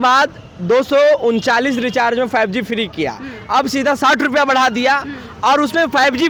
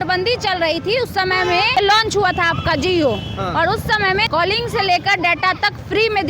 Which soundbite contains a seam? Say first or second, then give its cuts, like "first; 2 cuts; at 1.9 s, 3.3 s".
second; 2 cuts; at 1.7 s, 4.3 s